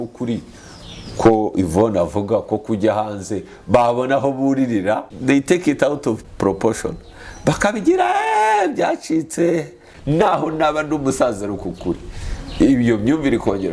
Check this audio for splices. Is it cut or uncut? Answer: cut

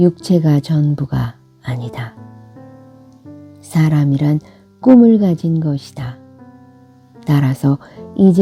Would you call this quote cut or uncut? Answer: uncut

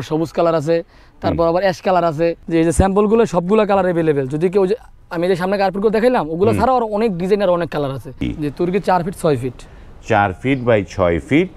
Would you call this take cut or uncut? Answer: cut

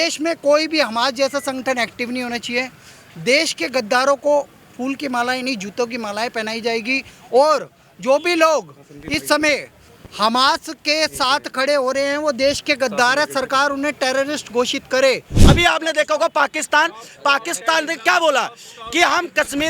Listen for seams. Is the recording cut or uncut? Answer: cut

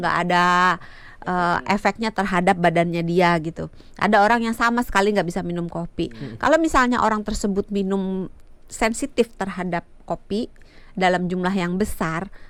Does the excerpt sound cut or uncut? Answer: uncut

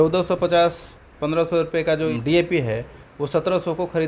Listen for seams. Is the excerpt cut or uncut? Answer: cut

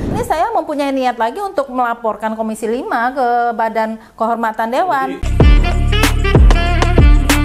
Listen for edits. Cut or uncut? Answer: uncut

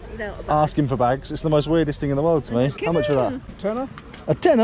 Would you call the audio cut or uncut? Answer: cut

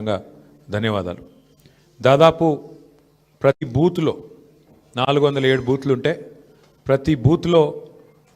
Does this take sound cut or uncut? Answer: cut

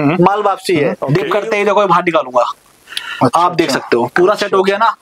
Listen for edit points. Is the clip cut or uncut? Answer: cut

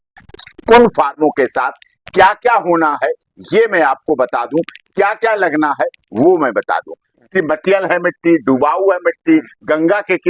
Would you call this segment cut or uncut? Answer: cut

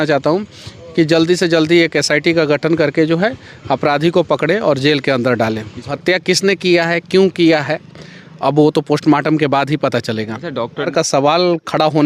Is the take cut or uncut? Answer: cut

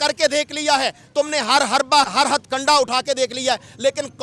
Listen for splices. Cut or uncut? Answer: cut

